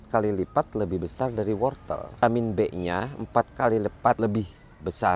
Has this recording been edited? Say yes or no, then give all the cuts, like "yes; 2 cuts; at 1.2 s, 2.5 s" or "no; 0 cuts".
yes; 2 cuts; at 2.2 s, 4.2 s